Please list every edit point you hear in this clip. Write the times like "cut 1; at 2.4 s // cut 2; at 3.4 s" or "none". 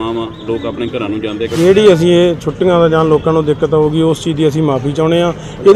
cut 1; at 1.5 s